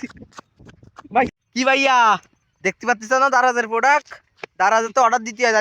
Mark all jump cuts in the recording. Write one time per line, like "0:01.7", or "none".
0:01.3